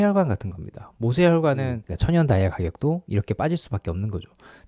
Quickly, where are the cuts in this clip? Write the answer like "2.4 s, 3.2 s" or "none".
1.8 s